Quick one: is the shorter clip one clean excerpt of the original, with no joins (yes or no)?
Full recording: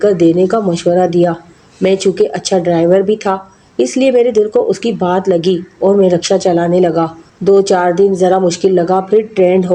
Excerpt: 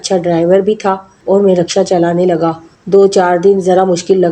no